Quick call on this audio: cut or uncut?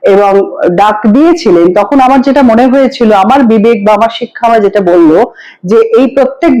uncut